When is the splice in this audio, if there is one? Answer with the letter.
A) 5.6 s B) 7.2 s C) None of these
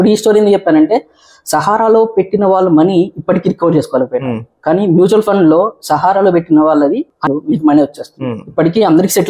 B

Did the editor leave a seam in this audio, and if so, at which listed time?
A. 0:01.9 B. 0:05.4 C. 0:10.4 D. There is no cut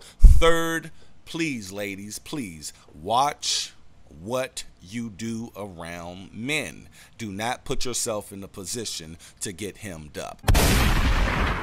C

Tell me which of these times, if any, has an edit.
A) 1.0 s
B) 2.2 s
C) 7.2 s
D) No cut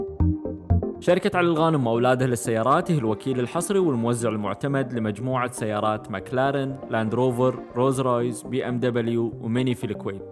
A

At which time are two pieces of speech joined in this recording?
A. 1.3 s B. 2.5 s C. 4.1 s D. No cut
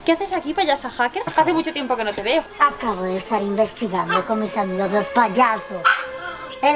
D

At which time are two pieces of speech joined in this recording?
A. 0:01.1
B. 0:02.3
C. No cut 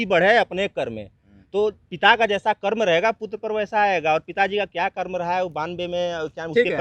C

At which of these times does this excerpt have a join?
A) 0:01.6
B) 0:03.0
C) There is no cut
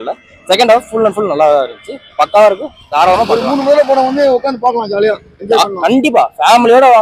C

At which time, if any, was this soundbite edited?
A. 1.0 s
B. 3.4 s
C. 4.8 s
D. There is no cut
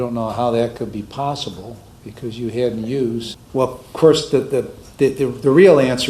B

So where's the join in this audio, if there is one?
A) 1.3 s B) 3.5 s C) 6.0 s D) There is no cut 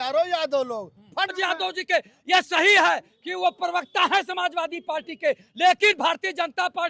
A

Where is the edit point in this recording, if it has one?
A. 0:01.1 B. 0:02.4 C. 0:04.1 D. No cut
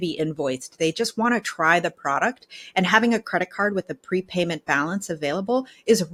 D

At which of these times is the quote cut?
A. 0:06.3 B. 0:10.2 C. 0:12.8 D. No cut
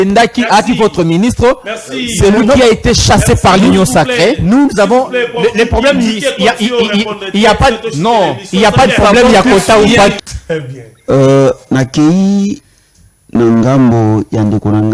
B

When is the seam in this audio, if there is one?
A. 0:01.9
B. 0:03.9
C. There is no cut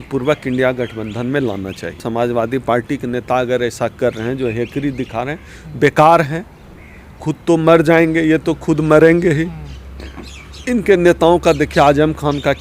A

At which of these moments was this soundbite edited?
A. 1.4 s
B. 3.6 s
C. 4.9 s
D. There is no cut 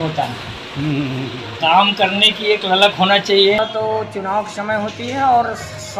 B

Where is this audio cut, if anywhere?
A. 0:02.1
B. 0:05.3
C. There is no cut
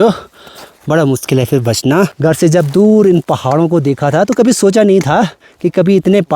A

